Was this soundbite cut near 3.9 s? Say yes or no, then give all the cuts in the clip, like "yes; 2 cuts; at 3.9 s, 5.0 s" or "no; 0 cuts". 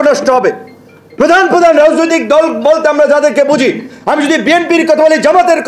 no; 0 cuts